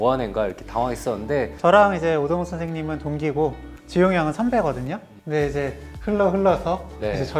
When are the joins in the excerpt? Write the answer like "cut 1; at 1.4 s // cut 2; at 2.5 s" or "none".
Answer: cut 1; at 1.5 s

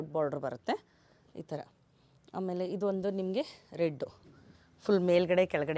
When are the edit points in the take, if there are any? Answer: none

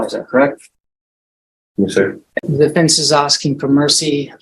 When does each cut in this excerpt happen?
cut 1; at 2.4 s

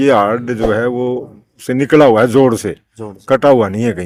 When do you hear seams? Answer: none

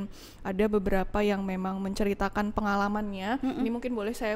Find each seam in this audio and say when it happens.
none

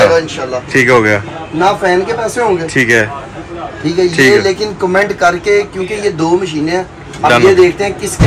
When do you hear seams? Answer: none

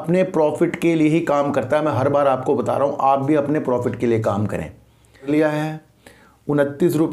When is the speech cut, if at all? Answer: cut 1; at 5.3 s

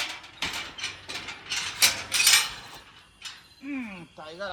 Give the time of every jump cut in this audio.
none

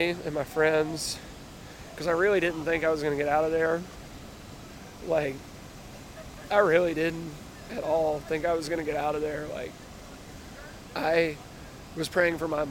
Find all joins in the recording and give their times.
cut 1; at 10.8 s

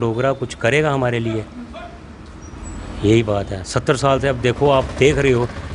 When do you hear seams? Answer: none

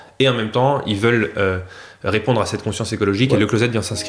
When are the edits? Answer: none

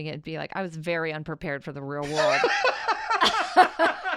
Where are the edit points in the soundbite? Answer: none

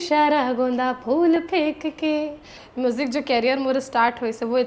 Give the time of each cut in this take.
cut 1; at 2.6 s

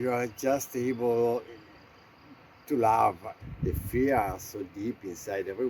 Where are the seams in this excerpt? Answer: cut 1; at 3.4 s

